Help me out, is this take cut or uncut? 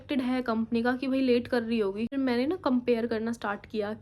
cut